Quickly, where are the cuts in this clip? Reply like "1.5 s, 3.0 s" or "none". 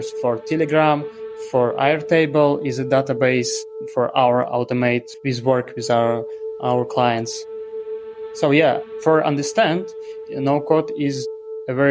5.1 s, 7.7 s